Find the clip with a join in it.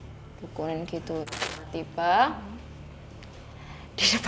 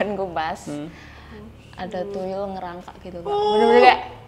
first; 1 cut; at 1.6 s

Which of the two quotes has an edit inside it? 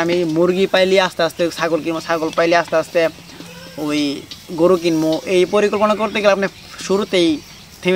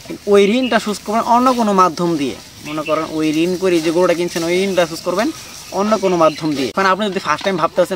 second; 1 cut; at 6.7 s

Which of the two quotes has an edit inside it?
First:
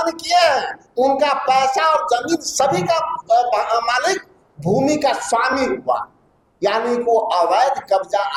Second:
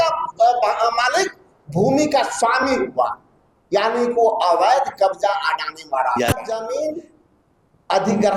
second; 1 cut; at 6.5 s

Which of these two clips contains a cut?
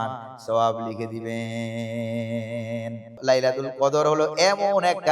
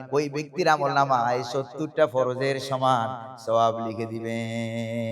first; 1 cut; at 3.2 s

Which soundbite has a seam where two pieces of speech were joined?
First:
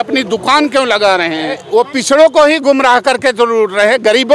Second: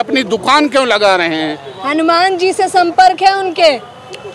first; 1 cut; at 1.6 s

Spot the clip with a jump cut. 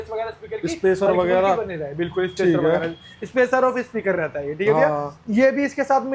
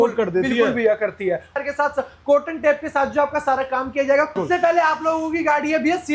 second; 2 cuts; at 1.6 s, 4.4 s

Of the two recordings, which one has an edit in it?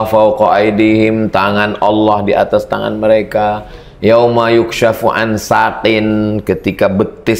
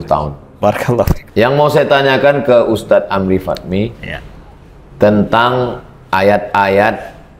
second; 1 cut; at 1.2 s

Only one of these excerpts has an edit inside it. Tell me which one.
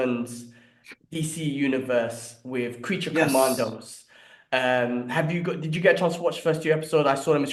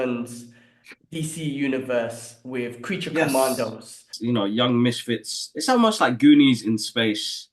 second; 1 cut; at 4.1 s

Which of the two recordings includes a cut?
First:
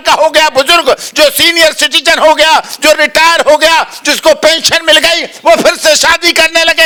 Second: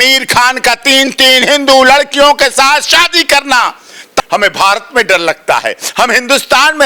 second; 1 cut; at 4.2 s

